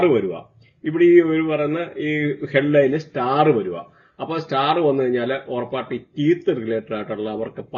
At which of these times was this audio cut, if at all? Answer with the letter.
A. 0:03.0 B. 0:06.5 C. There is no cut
C